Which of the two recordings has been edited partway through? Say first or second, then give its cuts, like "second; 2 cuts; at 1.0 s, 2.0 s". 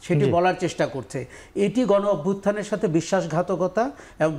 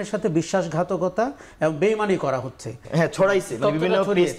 second; 1 cut; at 2.8 s